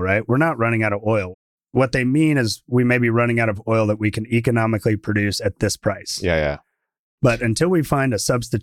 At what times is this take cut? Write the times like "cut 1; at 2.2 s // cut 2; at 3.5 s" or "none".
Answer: cut 1; at 1.3 s